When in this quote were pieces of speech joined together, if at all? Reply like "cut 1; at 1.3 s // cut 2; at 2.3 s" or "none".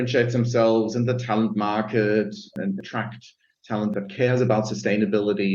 cut 1; at 2.5 s // cut 2; at 3.9 s